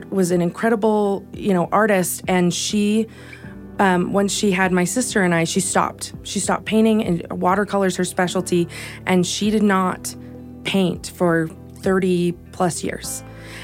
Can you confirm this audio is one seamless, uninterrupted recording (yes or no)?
yes